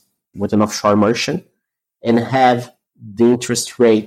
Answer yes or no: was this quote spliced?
no